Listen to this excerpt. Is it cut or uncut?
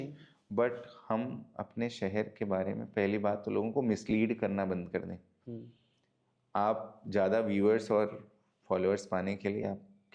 uncut